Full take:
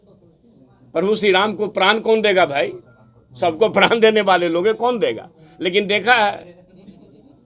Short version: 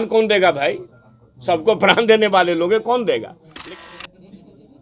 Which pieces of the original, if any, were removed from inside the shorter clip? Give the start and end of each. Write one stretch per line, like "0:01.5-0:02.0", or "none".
0:05.7-0:06.3